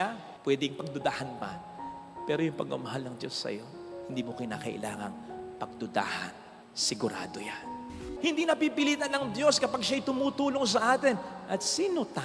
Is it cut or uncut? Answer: cut